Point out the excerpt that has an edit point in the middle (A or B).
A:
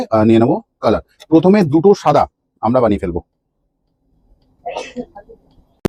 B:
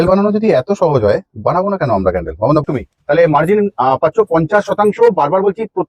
B